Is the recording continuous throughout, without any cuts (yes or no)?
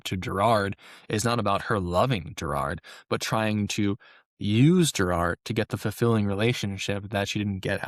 yes